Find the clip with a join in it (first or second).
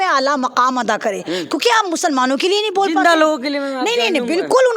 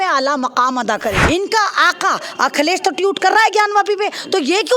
second